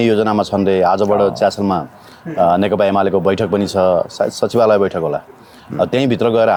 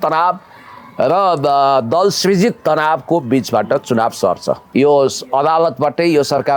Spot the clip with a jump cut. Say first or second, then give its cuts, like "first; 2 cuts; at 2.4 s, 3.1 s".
second; 1 cut; at 4.6 s